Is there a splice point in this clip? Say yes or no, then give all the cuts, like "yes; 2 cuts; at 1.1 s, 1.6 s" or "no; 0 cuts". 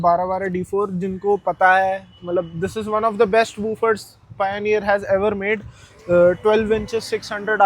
no; 0 cuts